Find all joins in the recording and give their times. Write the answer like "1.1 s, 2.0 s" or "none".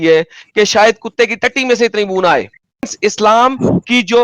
2.9 s